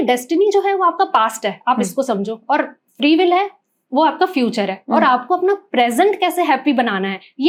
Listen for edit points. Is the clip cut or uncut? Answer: uncut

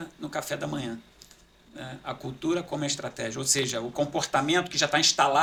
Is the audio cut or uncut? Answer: uncut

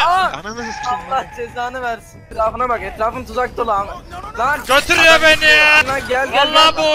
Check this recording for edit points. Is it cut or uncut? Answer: cut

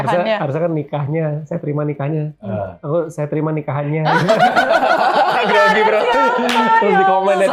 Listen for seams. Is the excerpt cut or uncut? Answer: uncut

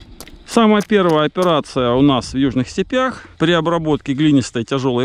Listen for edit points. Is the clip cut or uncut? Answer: uncut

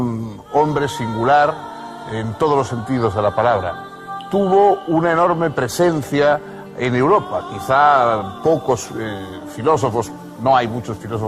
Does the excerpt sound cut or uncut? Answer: uncut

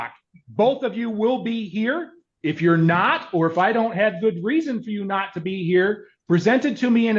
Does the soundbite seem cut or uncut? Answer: uncut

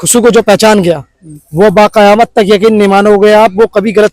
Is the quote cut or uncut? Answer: uncut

